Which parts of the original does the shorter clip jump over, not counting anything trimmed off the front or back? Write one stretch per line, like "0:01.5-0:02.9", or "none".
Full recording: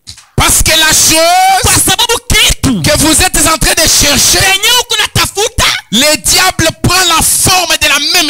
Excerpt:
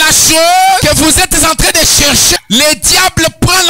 0:01.6-0:02.8
0:04.4-0:05.8